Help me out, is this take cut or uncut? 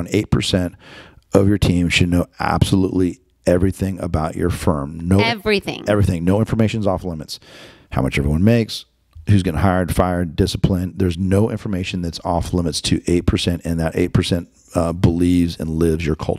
uncut